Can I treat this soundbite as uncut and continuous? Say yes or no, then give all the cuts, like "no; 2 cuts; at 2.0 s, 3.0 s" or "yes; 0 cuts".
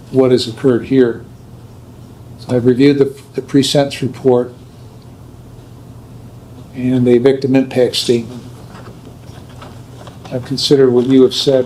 yes; 0 cuts